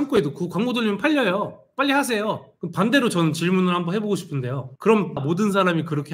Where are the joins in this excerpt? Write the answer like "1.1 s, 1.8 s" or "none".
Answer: 2.5 s, 5.2 s

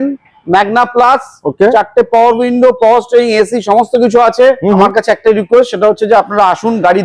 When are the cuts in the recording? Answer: 4.9 s

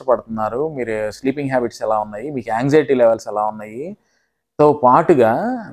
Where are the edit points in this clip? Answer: none

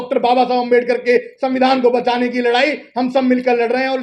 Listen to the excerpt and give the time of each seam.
none

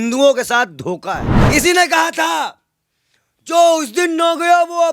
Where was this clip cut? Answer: 1.3 s

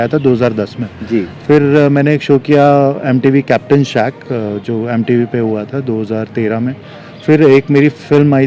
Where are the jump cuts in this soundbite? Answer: none

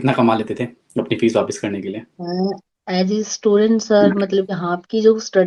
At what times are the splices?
4.5 s

